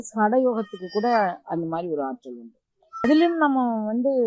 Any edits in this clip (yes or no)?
yes